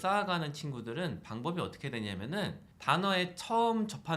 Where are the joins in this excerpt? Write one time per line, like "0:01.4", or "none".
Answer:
0:02.7